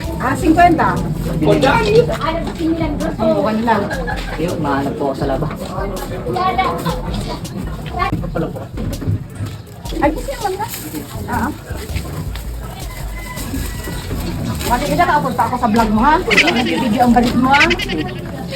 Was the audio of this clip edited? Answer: no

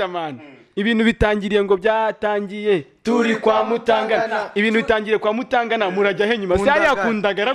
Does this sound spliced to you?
no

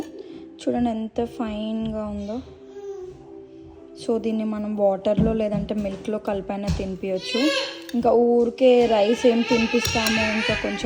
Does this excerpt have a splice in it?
no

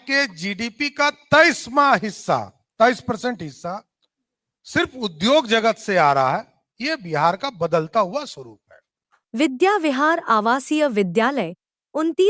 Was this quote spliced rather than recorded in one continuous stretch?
no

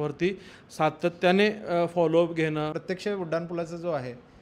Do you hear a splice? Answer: yes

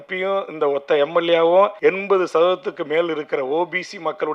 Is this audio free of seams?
no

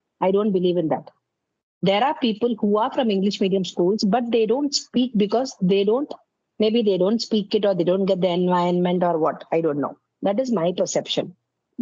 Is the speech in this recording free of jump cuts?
yes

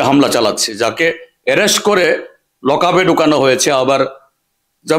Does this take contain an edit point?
no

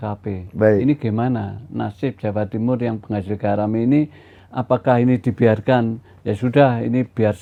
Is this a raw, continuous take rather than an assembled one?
yes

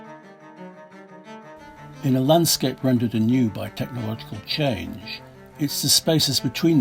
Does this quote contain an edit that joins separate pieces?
no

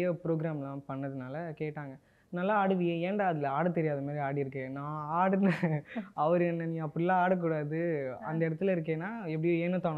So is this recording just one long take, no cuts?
yes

